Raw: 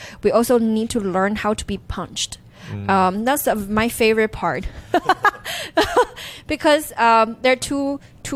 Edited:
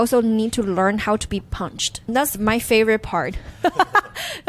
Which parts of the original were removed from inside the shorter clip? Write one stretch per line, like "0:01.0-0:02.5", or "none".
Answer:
0:02.7-0:03.6